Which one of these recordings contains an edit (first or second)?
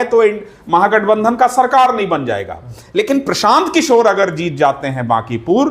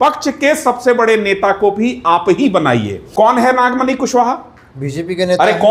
second